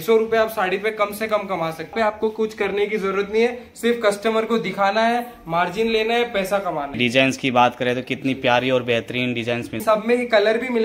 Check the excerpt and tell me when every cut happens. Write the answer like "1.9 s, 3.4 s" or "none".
1.9 s, 7.0 s, 9.8 s